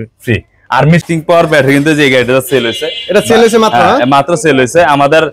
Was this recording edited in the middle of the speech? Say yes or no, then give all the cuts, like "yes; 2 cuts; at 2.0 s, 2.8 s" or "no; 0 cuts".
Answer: yes; 1 cut; at 1.0 s